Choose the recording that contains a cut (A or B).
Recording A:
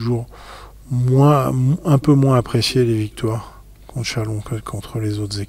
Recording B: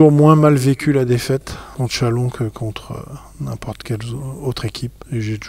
B